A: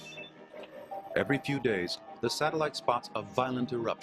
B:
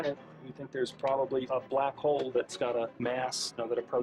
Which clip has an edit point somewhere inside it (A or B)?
B